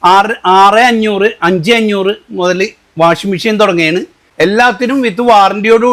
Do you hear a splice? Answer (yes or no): yes